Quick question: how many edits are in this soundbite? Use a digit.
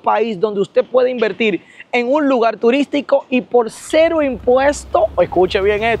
0